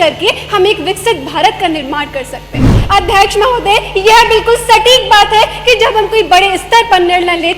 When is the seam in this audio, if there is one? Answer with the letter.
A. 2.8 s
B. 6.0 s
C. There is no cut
A